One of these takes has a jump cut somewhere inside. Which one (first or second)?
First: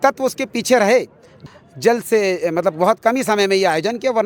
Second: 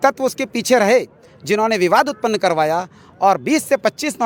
first